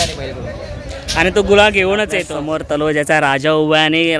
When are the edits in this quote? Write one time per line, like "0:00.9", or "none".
0:02.4